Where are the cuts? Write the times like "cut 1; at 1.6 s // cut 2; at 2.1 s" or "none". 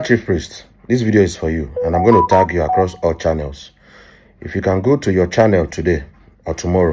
none